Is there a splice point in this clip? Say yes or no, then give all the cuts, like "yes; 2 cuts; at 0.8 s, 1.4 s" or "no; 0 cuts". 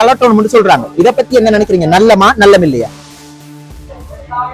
no; 0 cuts